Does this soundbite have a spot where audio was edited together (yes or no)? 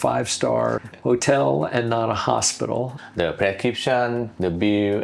yes